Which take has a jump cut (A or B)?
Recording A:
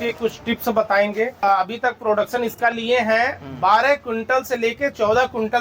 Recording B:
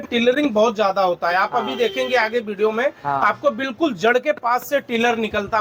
A